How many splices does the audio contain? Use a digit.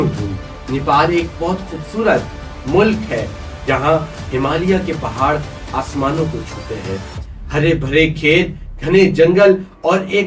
0